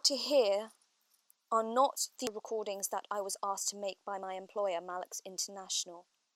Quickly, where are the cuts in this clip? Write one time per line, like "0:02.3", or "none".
0:02.3